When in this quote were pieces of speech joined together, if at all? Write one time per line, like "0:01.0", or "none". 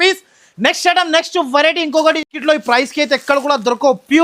none